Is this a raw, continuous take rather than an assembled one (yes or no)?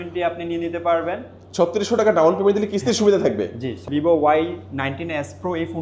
no